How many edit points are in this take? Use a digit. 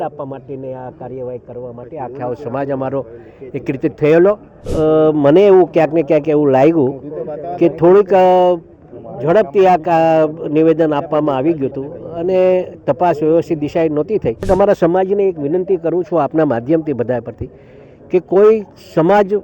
2